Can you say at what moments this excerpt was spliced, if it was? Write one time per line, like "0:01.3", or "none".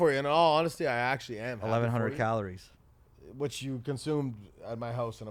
none